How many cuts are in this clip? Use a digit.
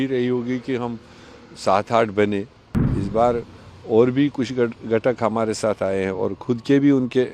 1